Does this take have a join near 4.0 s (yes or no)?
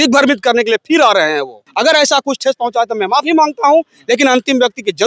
no